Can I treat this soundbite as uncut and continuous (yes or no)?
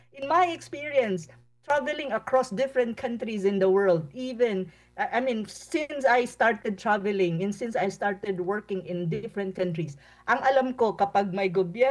yes